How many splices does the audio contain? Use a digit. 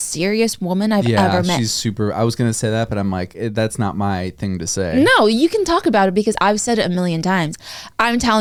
0